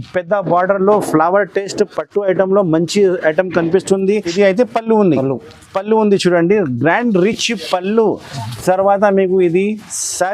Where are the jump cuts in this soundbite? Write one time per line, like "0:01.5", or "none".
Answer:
0:04.3